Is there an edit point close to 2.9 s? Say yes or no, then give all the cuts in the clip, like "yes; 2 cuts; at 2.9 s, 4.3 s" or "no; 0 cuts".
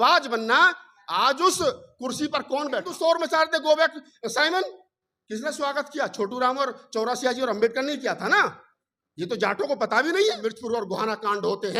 yes; 2 cuts; at 2.9 s, 10.5 s